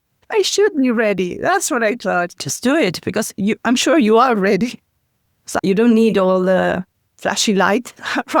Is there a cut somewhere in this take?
yes; 2 cuts; at 2.4 s, 5.4 s

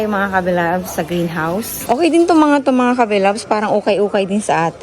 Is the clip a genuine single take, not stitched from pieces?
no; 1 cut; at 1.8 s

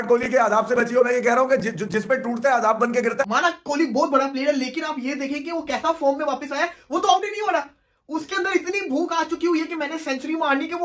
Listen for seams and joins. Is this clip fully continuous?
no; 1 cut; at 3.2 s

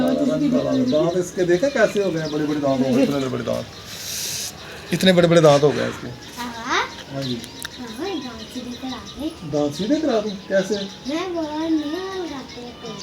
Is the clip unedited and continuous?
yes; 0 cuts

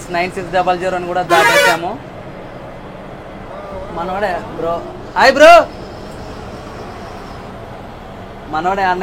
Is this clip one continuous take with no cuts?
yes; 0 cuts

